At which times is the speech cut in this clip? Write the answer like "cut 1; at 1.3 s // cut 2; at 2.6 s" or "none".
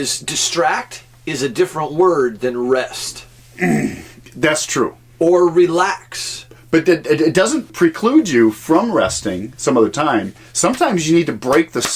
cut 1; at 7.7 s